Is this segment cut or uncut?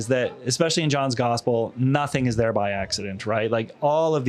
uncut